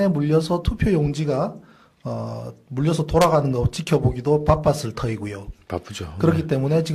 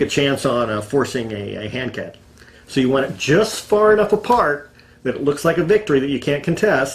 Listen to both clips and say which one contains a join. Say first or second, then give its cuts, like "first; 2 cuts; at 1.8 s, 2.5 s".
second; 1 cut; at 2.9 s